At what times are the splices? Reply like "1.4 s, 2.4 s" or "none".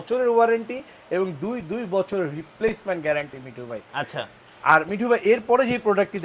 none

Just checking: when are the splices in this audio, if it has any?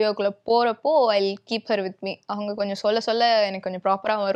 none

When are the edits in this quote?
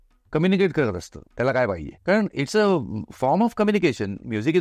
1.9 s

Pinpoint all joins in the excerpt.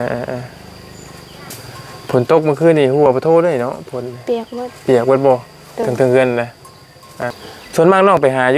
1.5 s, 7.3 s

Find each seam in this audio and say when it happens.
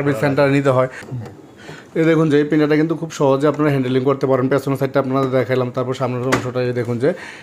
1.0 s

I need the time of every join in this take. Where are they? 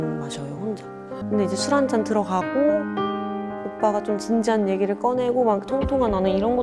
1.2 s

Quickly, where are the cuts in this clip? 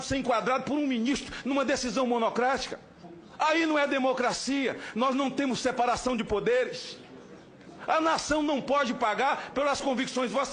none

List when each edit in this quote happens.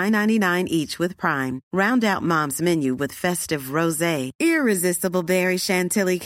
none

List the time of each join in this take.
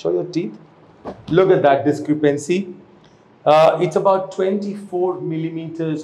none

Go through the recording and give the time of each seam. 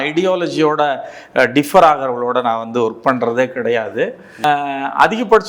4.4 s

